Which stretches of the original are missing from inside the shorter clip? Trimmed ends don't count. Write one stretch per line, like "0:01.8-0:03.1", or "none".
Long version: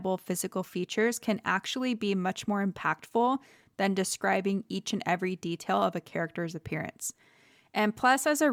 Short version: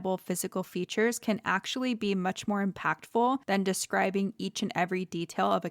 0:03.4-0:03.7